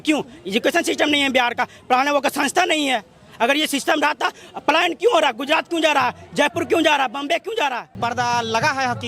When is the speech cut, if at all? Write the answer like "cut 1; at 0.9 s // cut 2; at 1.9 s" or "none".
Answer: cut 1; at 7.9 s